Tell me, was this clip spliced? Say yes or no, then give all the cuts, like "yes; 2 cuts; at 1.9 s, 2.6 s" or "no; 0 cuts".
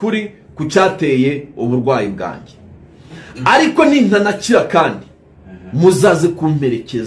no; 0 cuts